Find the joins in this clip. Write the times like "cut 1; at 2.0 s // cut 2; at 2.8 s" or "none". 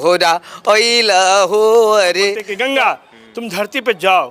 cut 1; at 2.5 s

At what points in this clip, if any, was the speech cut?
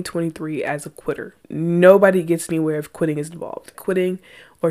cut 1; at 1.4 s // cut 2; at 3.8 s

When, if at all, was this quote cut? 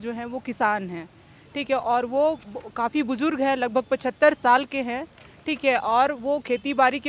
none

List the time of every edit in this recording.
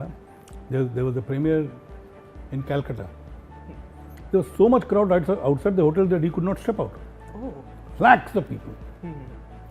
cut 1; at 7.8 s

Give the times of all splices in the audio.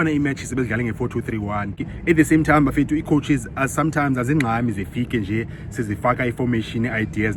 none

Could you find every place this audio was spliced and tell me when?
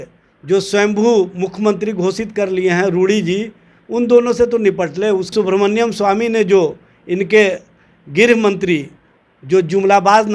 cut 1; at 5.3 s

